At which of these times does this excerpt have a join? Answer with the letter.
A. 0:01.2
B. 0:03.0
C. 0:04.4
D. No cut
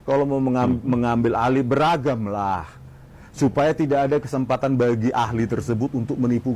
D